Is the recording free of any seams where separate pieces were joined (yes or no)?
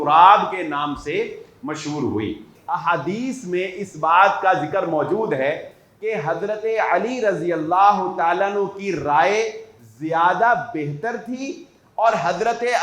no